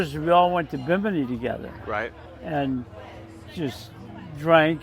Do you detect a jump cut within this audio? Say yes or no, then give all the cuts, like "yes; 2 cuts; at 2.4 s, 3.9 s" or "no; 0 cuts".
no; 0 cuts